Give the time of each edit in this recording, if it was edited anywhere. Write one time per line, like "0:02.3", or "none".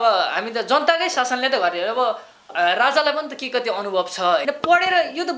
0:04.4